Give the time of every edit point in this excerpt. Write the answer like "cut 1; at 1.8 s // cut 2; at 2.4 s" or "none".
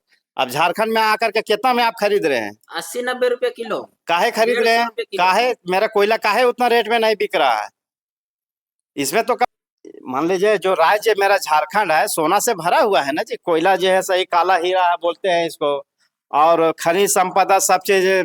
cut 1; at 9.4 s